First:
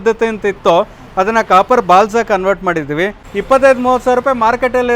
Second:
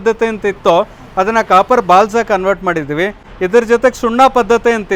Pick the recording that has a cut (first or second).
first